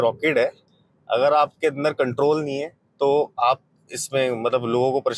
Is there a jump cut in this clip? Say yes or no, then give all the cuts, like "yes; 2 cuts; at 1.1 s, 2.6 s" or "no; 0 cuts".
no; 0 cuts